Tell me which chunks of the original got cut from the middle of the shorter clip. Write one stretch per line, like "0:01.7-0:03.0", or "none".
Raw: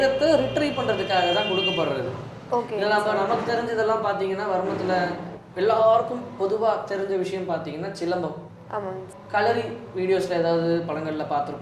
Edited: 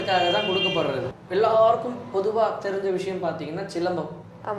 0:02.2-0:05.4